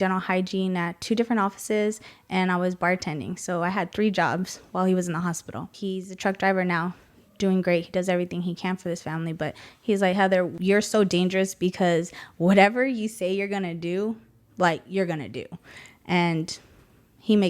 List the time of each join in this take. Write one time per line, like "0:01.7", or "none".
0:05.7
0:10.5